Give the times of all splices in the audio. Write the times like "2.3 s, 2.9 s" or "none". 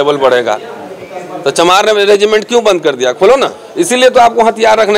3.6 s